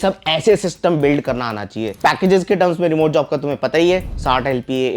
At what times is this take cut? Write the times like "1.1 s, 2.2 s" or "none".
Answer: 2.0 s